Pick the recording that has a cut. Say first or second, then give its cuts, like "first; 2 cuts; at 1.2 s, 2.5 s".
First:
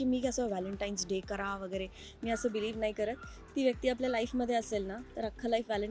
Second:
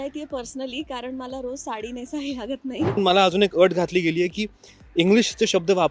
second; 1 cut; at 3.0 s